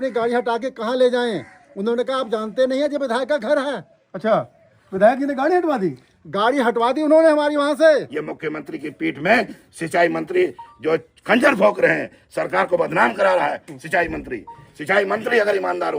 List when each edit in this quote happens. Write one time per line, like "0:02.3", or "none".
0:08.1